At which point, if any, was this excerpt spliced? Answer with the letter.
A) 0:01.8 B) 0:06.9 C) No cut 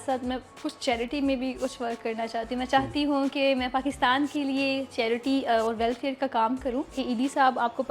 B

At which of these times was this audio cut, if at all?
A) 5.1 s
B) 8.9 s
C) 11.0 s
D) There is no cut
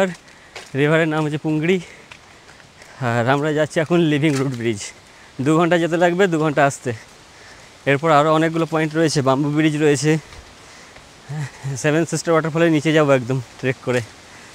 D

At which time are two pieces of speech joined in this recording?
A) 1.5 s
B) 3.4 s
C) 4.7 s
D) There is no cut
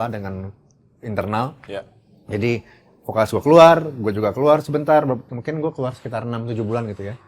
D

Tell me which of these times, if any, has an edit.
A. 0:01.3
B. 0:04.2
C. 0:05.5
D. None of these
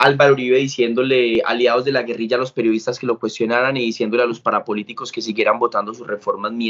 A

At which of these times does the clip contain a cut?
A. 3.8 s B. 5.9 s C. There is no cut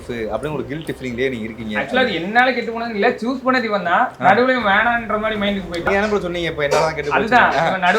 B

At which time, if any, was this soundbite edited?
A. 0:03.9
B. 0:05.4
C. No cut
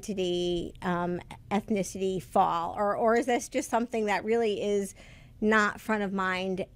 A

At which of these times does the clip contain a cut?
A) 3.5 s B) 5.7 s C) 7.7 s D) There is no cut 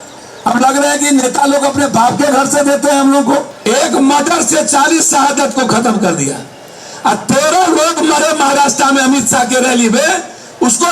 A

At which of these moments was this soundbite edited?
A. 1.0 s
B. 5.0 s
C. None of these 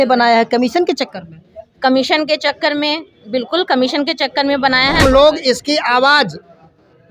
B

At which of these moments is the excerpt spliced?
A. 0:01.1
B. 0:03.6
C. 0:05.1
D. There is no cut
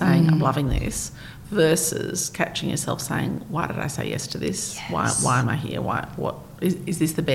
D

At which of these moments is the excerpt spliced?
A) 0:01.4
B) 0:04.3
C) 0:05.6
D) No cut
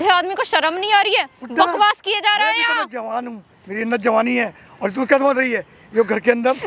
D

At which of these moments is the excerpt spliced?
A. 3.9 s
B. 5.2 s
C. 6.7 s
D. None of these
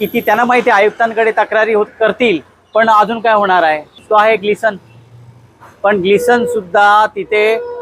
A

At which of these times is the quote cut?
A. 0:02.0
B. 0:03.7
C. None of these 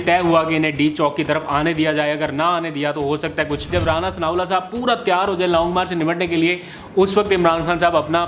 B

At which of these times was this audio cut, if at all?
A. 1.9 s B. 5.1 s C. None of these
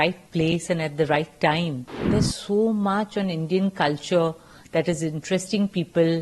A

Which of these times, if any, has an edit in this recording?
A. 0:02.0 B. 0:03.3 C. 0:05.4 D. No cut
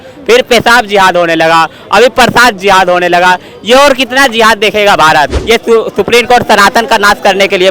C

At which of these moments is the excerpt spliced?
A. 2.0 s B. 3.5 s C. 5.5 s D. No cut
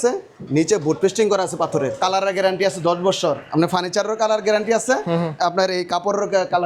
A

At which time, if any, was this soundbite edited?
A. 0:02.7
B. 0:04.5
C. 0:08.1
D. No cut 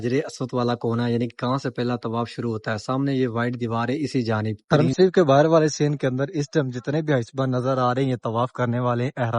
B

